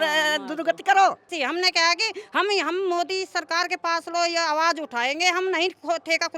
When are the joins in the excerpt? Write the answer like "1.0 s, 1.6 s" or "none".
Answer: 1.3 s

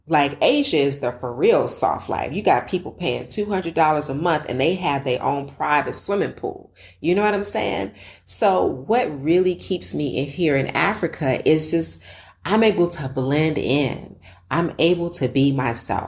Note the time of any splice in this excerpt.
none

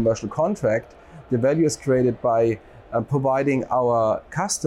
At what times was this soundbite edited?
none

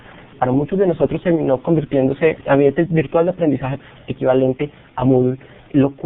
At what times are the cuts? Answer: 2.6 s

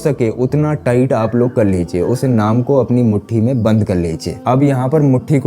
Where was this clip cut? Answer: none

